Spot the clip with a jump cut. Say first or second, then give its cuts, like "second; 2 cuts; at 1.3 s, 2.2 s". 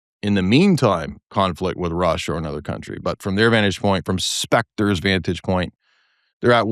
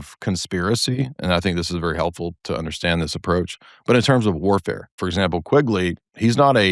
second; 1 cut; at 5.0 s